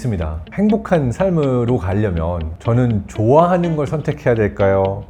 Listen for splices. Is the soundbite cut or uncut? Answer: uncut